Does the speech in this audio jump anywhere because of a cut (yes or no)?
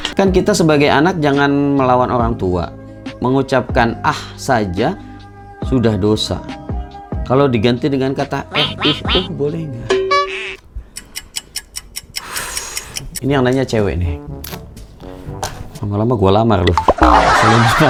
no